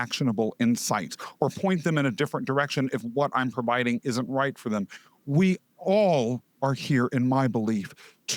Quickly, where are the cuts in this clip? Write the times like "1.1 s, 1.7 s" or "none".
6.5 s